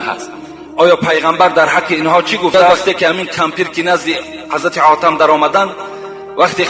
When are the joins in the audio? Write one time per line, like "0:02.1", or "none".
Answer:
0:02.7